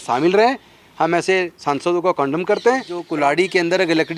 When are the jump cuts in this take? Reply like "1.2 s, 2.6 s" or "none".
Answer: 3.0 s